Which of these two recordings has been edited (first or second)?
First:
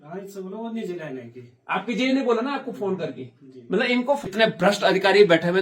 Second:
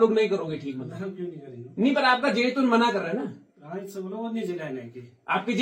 first